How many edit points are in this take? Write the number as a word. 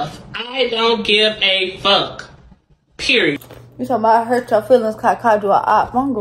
one